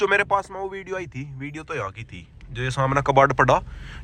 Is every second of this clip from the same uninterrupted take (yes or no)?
yes